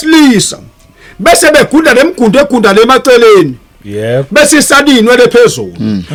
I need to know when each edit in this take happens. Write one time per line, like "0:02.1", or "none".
none